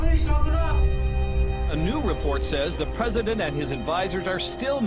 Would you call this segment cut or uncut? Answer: cut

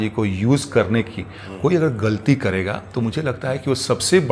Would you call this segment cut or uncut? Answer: uncut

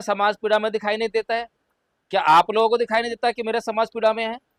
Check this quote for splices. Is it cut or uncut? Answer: uncut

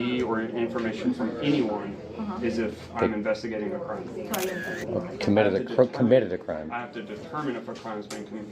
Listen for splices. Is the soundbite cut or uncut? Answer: uncut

